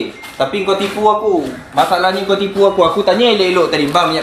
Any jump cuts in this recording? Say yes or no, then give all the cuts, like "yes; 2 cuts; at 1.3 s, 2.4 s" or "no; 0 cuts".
no; 0 cuts